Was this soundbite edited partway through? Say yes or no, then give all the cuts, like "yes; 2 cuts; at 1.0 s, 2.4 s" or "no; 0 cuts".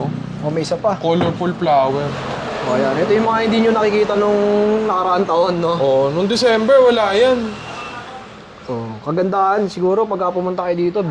no; 0 cuts